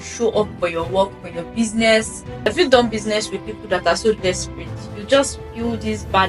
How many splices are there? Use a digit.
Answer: 1